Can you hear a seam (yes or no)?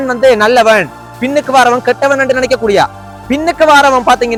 no